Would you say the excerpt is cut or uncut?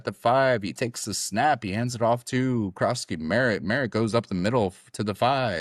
uncut